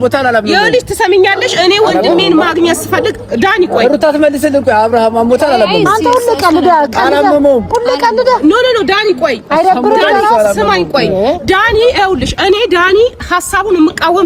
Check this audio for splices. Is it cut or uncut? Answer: uncut